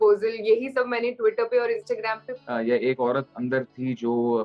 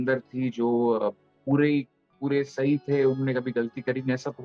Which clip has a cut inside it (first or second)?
first